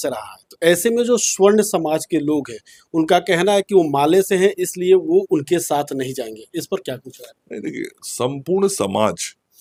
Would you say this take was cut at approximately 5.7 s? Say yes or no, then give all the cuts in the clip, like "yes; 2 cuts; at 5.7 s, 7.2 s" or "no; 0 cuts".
no; 0 cuts